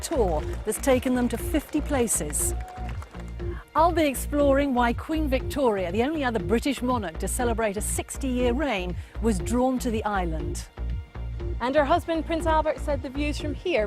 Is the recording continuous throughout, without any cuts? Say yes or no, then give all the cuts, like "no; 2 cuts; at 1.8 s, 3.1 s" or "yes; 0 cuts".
no; 1 cut; at 11.7 s